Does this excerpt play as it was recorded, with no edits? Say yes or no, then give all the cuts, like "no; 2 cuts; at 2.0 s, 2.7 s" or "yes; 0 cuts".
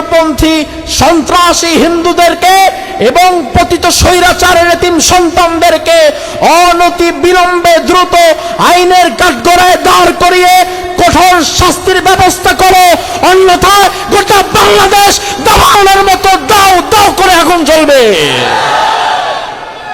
yes; 0 cuts